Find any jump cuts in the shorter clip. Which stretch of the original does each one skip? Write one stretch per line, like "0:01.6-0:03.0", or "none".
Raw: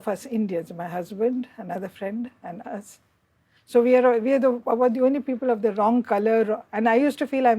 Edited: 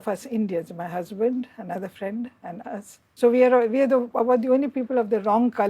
0:03.0-0:03.5